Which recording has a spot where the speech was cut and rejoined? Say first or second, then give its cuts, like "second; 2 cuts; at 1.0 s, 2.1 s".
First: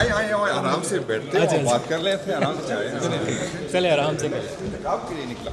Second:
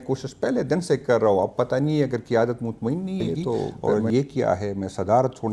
second; 1 cut; at 3.9 s